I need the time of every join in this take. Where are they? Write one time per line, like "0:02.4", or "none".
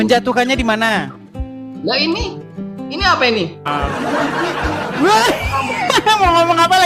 0:03.7